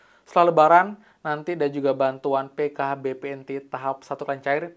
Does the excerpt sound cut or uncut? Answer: uncut